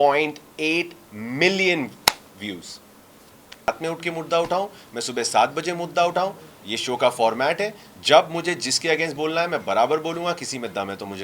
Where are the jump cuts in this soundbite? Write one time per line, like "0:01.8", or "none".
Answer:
0:03.7